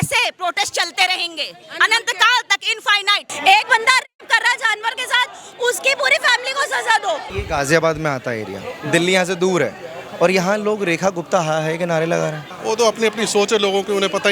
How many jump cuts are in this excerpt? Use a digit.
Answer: 3